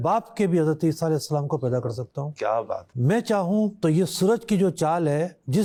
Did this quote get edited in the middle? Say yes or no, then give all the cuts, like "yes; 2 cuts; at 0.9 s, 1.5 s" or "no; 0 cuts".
no; 0 cuts